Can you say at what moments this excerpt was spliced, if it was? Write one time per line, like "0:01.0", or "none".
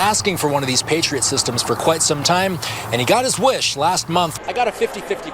0:04.4